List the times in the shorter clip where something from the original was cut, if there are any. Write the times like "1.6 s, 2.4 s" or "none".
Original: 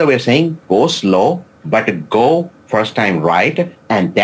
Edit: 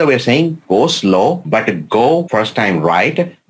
1.4 s, 2.3 s